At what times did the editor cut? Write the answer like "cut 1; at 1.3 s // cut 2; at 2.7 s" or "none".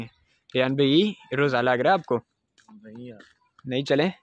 cut 1; at 3.2 s